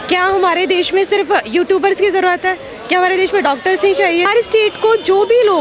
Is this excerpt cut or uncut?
cut